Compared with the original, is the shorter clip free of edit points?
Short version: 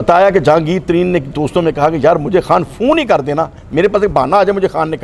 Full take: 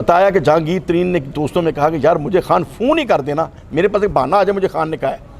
yes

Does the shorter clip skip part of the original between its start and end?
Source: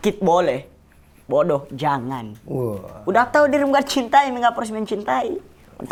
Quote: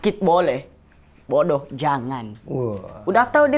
no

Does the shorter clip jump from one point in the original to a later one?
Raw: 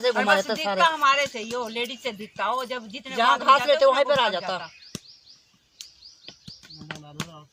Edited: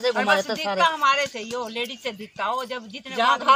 no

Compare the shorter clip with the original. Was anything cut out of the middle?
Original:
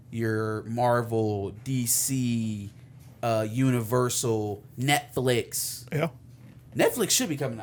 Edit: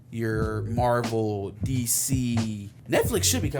yes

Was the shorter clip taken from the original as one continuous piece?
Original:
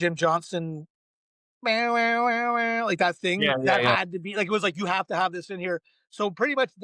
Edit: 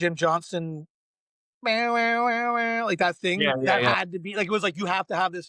yes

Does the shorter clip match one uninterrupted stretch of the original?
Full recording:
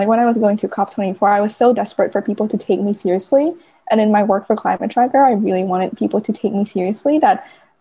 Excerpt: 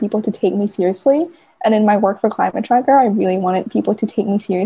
yes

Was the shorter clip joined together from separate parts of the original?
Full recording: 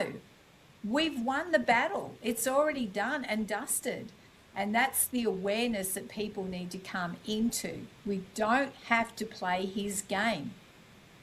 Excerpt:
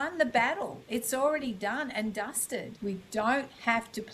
yes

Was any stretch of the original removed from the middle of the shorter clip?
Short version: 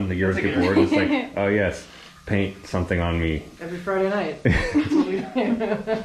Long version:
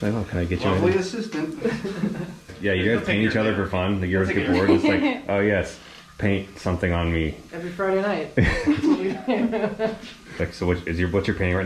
no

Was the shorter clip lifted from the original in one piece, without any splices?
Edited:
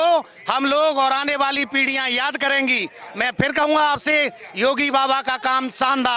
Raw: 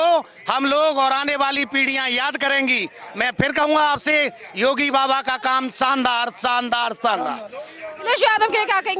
yes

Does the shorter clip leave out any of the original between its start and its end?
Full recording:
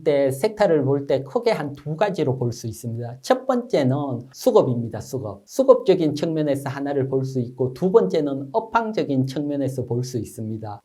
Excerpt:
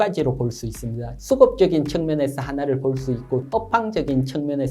yes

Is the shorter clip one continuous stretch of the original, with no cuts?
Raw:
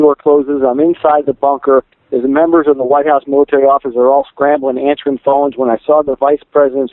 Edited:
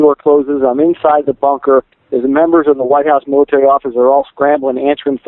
yes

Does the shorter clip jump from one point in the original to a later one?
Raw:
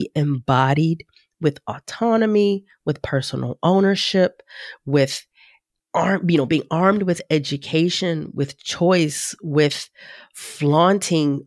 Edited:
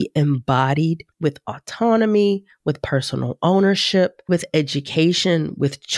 yes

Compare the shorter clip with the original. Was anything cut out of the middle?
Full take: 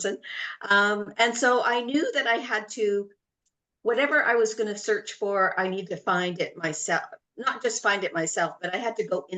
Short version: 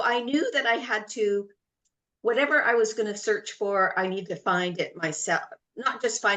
no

